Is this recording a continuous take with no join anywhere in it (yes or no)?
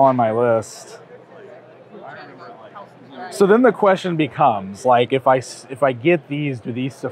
yes